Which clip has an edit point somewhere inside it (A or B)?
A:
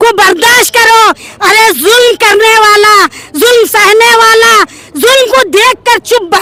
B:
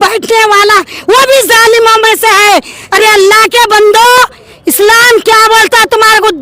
B